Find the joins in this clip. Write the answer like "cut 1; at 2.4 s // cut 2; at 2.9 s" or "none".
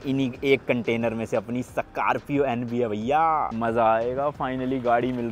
none